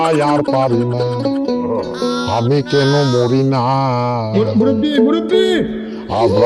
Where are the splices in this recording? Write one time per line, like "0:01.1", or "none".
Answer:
none